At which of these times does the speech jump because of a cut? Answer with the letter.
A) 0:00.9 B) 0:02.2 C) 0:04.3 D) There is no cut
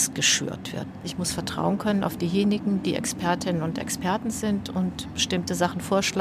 A